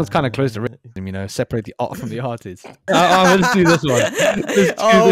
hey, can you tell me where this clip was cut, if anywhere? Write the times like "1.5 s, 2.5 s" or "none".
2.9 s